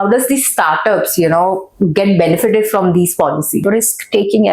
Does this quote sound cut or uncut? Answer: cut